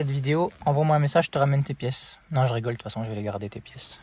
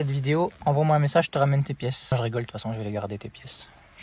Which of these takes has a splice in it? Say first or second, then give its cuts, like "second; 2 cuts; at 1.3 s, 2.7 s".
second; 1 cut; at 2.1 s